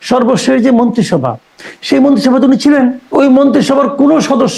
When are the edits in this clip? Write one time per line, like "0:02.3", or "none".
0:03.0